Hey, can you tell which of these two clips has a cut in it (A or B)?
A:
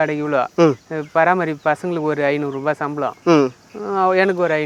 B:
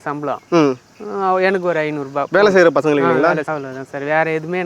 B